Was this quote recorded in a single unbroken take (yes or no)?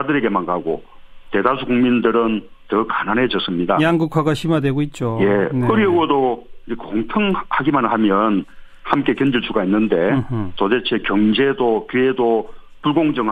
yes